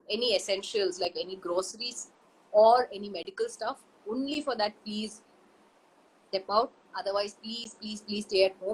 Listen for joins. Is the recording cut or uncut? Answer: uncut